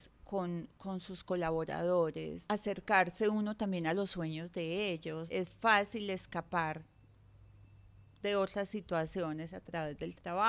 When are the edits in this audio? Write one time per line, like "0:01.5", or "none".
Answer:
0:02.3
0:05.2